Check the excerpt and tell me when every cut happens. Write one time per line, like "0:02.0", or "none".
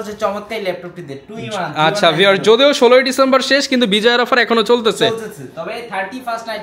none